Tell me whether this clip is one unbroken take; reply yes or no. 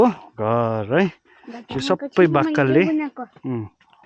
yes